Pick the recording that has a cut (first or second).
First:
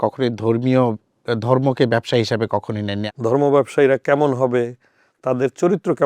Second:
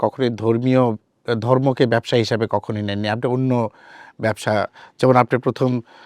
first